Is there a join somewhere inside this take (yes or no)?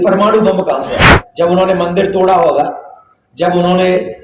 yes